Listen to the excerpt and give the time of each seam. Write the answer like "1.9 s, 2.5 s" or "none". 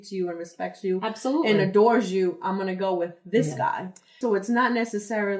4.2 s